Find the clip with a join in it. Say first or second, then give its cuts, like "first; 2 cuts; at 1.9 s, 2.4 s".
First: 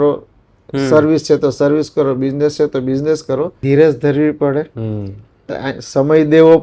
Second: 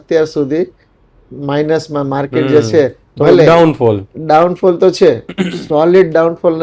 first; 1 cut; at 3.6 s